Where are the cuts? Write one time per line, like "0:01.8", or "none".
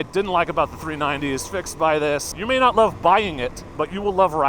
0:02.3
0:03.6